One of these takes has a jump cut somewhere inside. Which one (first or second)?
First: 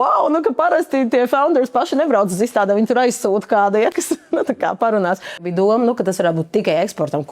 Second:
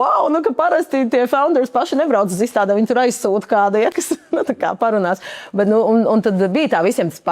first